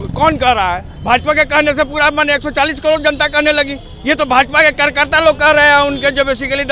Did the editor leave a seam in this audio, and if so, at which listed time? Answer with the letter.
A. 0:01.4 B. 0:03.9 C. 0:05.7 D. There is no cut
D